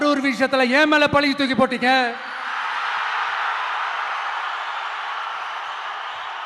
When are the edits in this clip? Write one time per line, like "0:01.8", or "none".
none